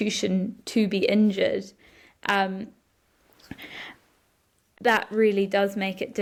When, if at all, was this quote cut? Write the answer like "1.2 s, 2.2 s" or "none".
none